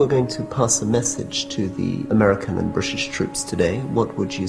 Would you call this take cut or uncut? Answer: cut